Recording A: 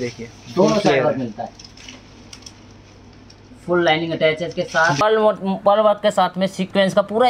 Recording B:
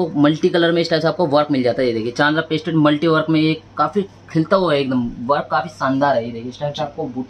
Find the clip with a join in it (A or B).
A